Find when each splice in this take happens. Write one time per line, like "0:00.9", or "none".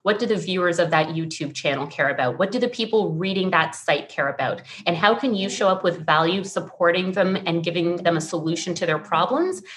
none